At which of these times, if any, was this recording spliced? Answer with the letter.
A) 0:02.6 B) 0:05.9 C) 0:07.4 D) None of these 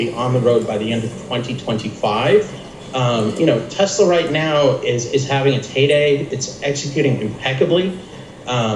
A